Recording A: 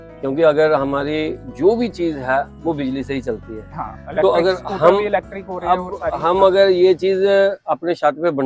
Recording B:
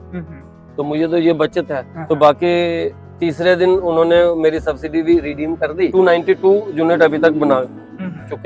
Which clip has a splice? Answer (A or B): B